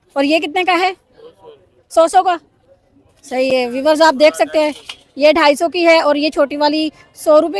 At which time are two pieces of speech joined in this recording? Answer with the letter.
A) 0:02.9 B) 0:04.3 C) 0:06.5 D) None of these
D